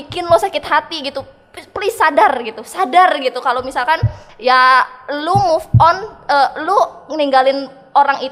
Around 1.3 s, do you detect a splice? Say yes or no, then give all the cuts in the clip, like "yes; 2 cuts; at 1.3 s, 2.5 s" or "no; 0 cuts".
no; 0 cuts